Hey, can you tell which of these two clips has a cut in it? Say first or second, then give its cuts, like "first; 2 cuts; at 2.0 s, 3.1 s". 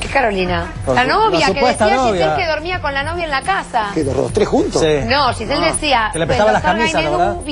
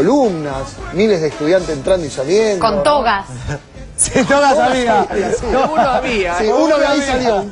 second; 1 cut; at 2.4 s